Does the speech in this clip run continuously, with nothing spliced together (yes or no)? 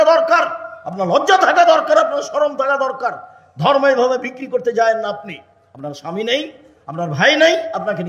yes